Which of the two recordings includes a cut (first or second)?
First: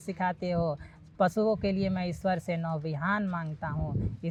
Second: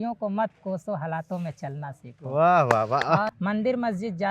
second